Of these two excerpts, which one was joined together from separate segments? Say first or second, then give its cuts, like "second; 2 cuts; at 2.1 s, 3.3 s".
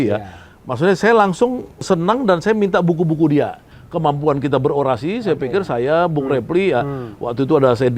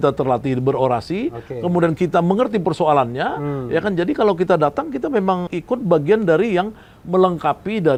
first; 2 cuts; at 1.8 s, 3.7 s